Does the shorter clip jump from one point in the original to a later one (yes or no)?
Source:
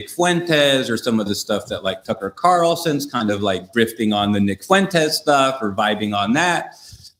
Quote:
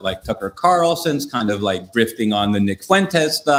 no